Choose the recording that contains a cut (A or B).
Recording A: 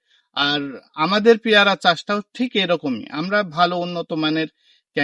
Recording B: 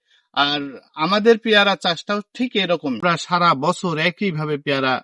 B